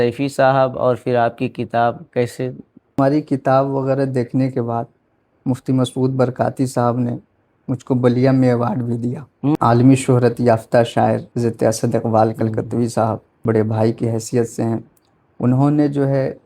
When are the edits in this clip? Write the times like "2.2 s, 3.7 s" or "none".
3.0 s, 9.6 s, 11.3 s, 13.3 s